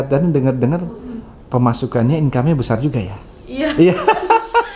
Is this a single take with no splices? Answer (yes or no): yes